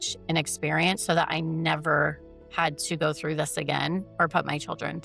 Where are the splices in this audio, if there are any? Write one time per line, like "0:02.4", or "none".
none